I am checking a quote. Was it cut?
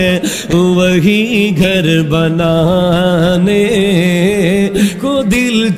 no; 0 cuts

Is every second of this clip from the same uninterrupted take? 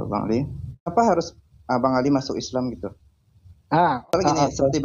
no; 2 cuts; at 0.9 s, 4.1 s

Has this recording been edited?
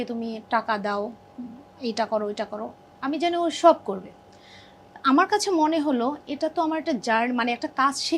no; 0 cuts

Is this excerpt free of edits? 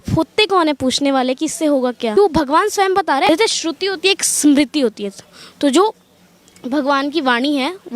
no; 2 cuts; at 2.2 s, 3.3 s

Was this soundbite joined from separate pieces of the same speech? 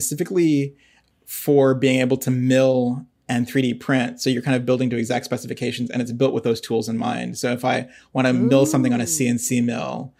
no; 0 cuts

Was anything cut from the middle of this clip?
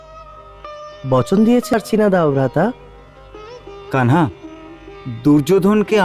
yes; 1 cut; at 1.7 s

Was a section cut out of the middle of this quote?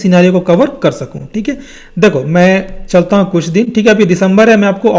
no; 0 cuts

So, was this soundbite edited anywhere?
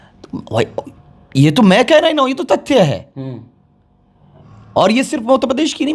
no; 0 cuts

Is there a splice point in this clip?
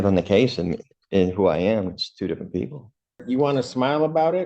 yes; 1 cut; at 3.2 s

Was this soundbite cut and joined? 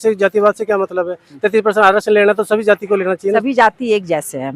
yes; 1 cut; at 3.4 s

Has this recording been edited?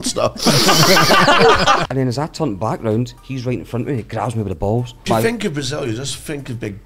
yes; 3 cuts; at 1.8 s, 3.2 s, 5.1 s

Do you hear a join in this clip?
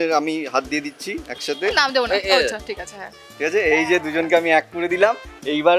no; 0 cuts

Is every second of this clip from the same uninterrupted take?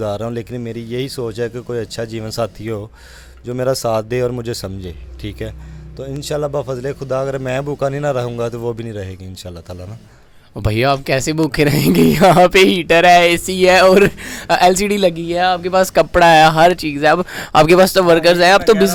yes; 0 cuts

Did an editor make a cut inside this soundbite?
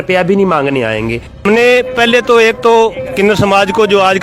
yes; 1 cut; at 1.4 s

